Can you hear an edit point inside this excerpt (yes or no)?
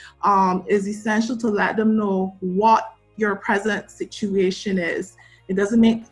no